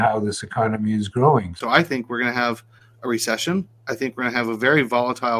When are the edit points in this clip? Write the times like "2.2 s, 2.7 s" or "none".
1.6 s